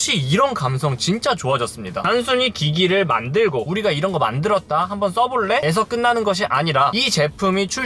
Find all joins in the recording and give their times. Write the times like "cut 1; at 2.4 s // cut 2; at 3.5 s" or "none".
cut 1; at 3.7 s